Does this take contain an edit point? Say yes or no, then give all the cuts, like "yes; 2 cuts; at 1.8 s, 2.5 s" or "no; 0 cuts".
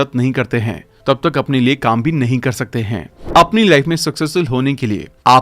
yes; 1 cut; at 3.1 s